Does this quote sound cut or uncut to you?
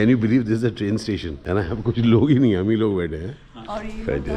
cut